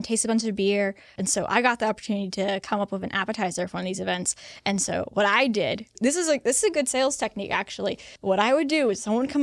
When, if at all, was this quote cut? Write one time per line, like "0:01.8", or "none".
0:01.2
0:06.0
0:08.1